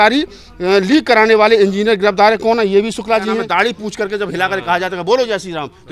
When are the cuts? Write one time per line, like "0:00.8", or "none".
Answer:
0:03.5